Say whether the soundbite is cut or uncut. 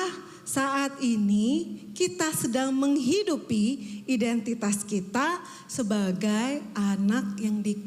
uncut